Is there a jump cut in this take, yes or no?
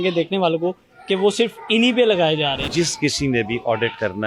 yes